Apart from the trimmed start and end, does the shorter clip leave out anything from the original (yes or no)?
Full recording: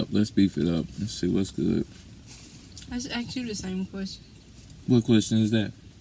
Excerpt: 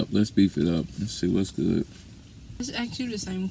yes